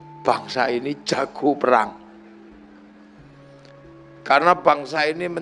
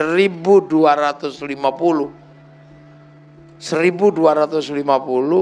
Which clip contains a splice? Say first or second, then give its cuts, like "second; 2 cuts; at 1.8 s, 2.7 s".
second; 2 cuts; at 2.3 s, 3.6 s